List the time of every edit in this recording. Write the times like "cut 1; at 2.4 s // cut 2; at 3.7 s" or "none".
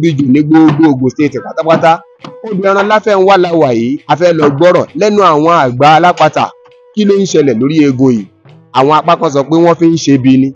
none